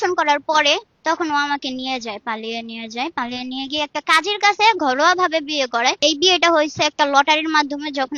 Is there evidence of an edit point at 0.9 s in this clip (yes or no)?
yes